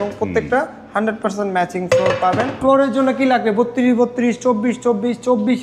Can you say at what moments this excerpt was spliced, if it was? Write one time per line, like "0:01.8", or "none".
0:02.6